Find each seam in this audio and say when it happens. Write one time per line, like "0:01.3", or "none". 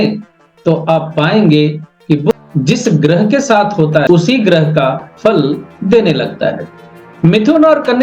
0:02.3
0:04.1